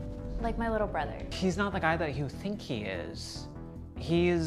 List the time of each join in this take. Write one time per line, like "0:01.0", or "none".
0:01.3